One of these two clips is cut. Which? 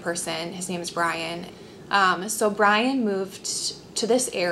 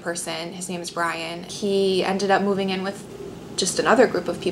second; 1 cut; at 1.5 s

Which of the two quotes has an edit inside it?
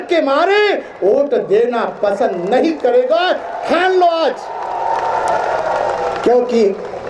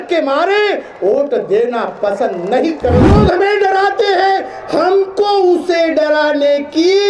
second; 1 cut; at 3.0 s

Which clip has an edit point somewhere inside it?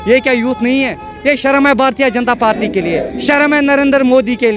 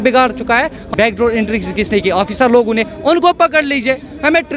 second; 1 cut; at 0.9 s

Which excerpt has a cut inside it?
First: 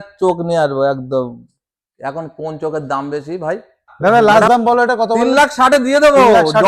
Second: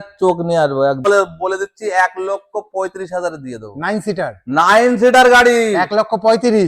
second; 1 cut; at 1.1 s

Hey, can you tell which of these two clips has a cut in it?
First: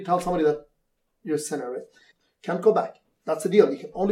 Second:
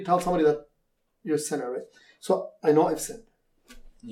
first; 1 cut; at 2.1 s

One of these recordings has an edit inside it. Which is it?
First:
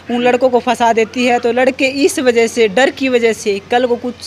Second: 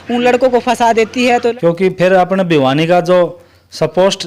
second; 1 cut; at 1.5 s

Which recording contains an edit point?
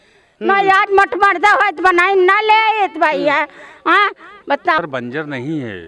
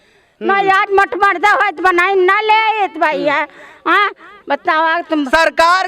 first; 1 cut; at 4.8 s

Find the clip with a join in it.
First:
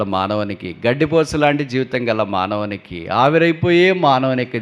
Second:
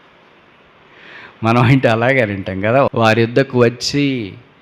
second; 1 cut; at 2.9 s

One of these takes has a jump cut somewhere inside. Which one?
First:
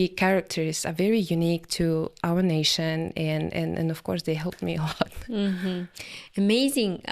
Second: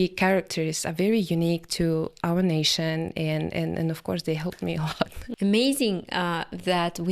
second; 1 cut; at 5.2 s

